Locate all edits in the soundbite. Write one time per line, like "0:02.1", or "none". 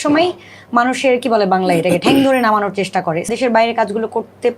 0:03.3